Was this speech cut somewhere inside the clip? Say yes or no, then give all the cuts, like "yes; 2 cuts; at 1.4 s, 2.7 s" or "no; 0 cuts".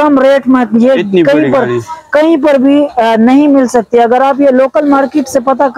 no; 0 cuts